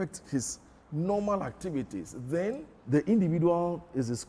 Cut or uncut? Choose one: cut